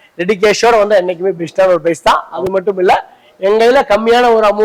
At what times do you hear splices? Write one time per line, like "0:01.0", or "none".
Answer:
none